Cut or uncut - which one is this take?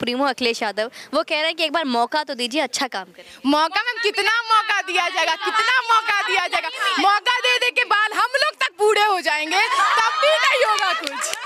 uncut